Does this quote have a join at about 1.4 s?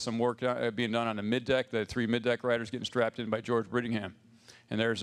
no; 1 cut; at 3.7 s

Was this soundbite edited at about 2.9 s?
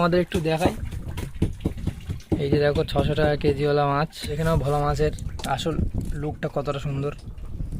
no; 1 cut; at 4.4 s

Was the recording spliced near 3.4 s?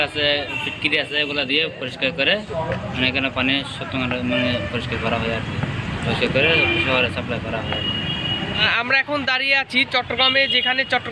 no; 1 cut; at 8.7 s

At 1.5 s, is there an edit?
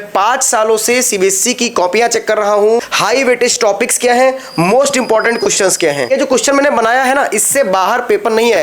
no; 2 cuts; at 2.8 s, 6.1 s

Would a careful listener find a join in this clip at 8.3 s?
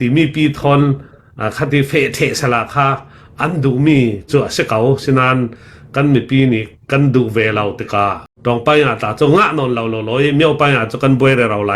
yes; 1 cut; at 8.3 s

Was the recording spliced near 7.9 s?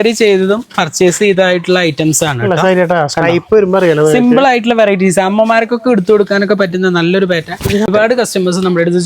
yes; 1 cut; at 7.9 s

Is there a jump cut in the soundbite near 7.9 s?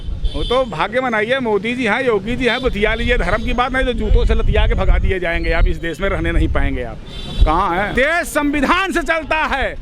yes; 1 cut; at 7.9 s

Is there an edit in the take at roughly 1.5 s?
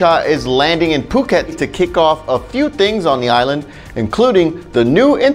yes; 1 cut; at 1.5 s

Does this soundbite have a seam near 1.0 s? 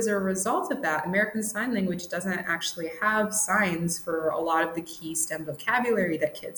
no; 0 cuts

